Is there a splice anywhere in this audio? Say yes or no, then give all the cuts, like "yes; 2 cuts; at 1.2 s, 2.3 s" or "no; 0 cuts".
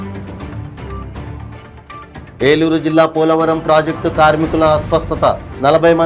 yes; 1 cut; at 1.3 s